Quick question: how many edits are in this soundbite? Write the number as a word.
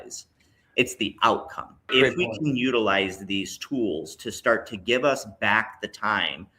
one